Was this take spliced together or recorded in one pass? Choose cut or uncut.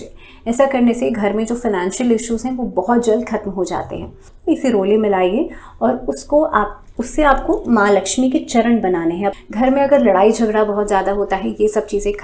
cut